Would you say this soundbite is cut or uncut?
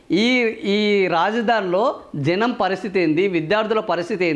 uncut